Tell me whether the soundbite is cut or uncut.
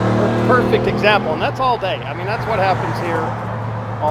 uncut